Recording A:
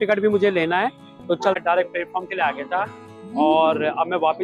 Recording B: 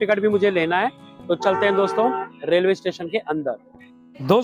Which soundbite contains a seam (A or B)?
A